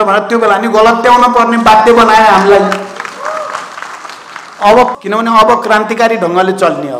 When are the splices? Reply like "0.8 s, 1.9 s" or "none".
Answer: 4.9 s